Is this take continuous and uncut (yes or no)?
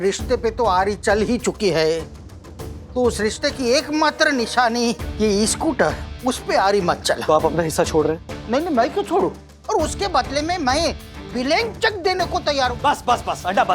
no